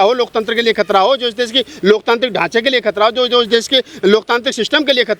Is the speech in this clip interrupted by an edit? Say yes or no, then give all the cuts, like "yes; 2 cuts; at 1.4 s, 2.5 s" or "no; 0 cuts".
no; 0 cuts